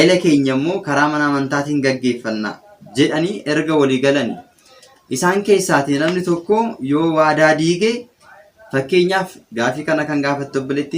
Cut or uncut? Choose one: uncut